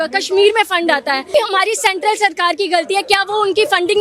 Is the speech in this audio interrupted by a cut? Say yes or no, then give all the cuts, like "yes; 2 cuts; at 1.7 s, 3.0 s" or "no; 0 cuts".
yes; 1 cut; at 1.3 s